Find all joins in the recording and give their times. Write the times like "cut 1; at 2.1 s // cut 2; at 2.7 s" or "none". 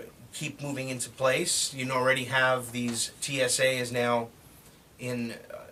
none